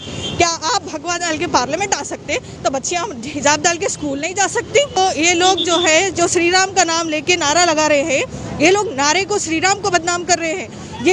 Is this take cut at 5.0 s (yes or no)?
yes